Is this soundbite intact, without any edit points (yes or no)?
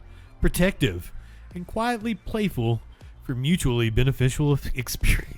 yes